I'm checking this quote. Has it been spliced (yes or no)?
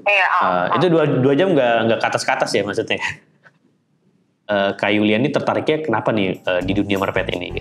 yes